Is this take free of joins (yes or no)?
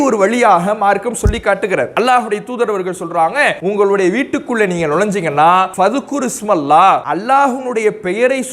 no